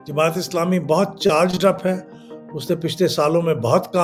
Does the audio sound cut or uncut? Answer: uncut